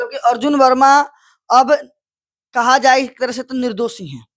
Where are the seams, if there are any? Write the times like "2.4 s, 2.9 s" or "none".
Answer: none